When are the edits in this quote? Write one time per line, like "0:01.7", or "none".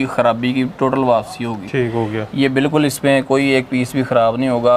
none